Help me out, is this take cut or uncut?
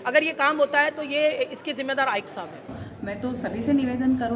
cut